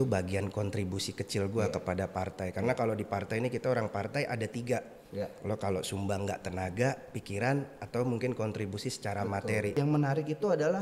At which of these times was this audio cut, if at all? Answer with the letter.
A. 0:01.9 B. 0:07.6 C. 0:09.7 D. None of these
C